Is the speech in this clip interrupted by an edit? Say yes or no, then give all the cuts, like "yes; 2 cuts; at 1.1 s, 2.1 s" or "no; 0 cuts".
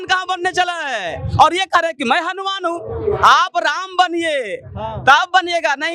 no; 0 cuts